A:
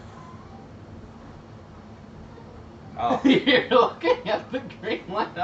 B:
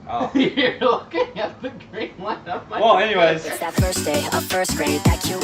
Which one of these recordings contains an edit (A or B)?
B